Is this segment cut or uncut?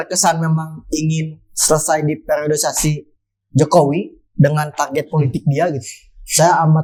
uncut